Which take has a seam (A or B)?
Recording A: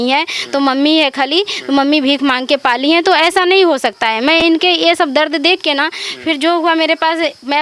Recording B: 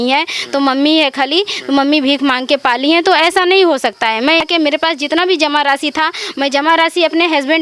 B